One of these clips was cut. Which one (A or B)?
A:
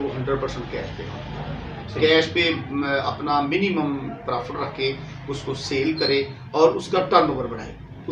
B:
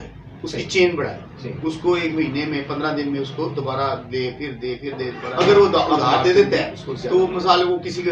B